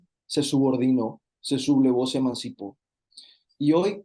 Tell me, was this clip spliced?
no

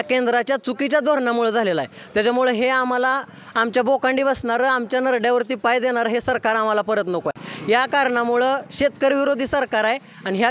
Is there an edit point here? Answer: no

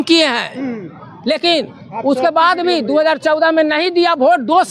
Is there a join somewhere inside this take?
no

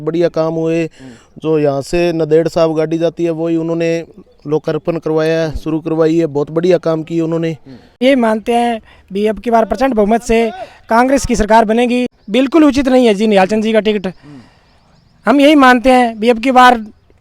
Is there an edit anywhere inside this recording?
yes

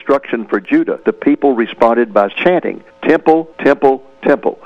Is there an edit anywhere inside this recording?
yes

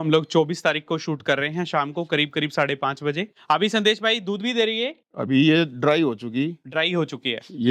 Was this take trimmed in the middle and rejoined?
yes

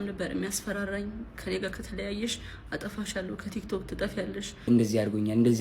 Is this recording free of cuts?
no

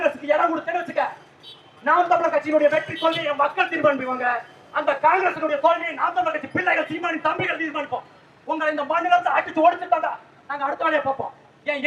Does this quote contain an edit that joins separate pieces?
no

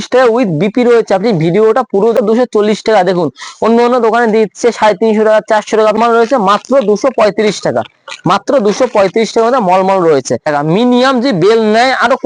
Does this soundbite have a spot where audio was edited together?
yes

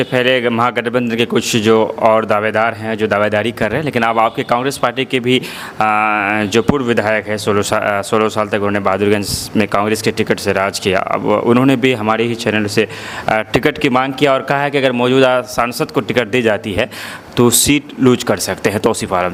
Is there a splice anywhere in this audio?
no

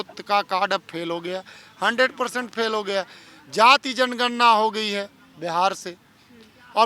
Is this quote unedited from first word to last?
yes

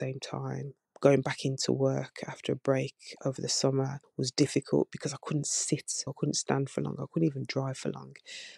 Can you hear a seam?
yes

